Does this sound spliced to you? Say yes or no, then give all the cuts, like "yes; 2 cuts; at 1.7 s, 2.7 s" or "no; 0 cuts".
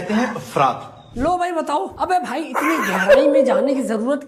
no; 0 cuts